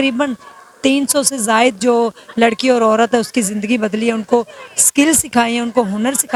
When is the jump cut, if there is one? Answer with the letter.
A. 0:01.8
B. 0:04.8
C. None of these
C